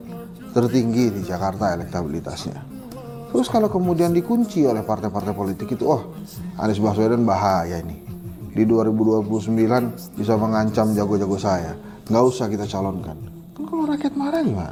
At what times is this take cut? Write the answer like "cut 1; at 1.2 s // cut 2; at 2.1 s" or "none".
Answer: none